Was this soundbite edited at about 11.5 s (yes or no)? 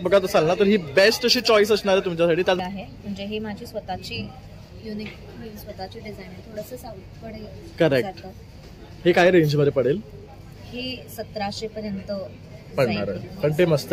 no